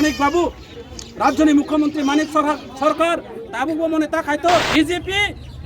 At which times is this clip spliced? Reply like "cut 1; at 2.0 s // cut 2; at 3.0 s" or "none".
cut 1; at 4.7 s